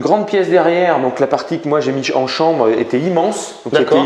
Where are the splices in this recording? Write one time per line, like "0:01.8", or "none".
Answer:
none